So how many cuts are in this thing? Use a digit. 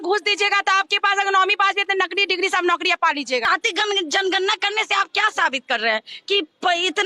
1